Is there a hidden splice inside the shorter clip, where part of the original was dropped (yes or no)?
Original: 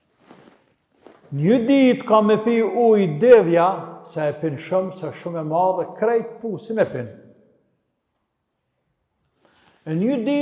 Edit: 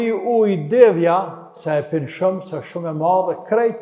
no